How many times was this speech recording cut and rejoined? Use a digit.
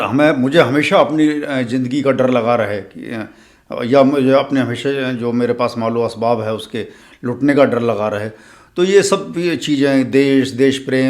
0